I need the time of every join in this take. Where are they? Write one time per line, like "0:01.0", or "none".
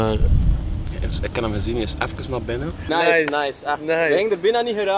0:02.8